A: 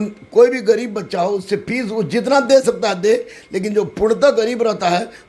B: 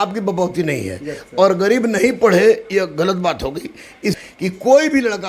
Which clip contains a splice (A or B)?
B